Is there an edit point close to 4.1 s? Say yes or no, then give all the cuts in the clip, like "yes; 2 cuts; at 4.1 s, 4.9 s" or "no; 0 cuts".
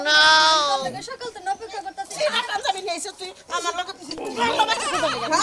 no; 1 cut; at 2.0 s